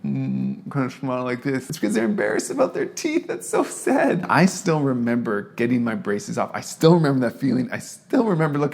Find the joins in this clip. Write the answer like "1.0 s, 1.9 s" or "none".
1.7 s, 4.3 s